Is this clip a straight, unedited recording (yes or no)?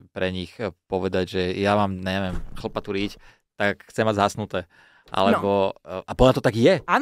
yes